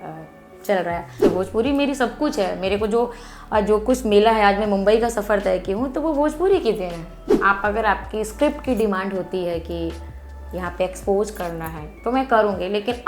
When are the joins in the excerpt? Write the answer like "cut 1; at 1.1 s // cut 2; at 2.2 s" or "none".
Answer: cut 1; at 1.2 s // cut 2; at 7.2 s

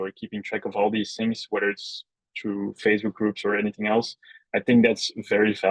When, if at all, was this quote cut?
none

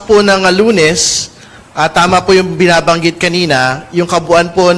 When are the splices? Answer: none

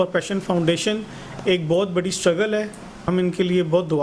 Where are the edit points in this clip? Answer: cut 1; at 3.0 s

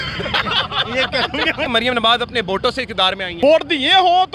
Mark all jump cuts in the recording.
cut 1; at 1.7 s // cut 2; at 3.3 s

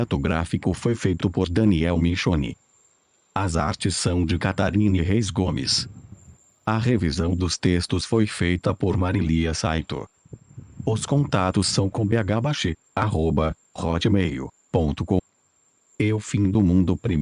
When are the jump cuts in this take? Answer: none

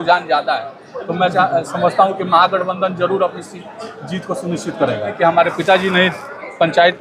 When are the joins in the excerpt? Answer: cut 1; at 5.1 s

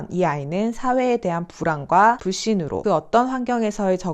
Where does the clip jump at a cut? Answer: cut 1; at 2.4 s

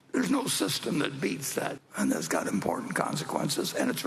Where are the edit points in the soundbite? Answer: cut 1; at 1.8 s

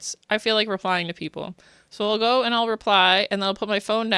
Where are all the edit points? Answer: none

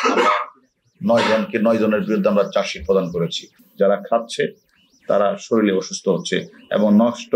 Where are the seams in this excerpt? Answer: cut 1; at 3.5 s

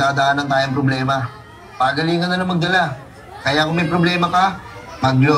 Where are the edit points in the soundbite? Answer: none

